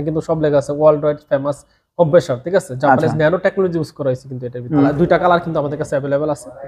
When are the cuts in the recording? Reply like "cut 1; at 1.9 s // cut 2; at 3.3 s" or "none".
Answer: cut 1; at 4.9 s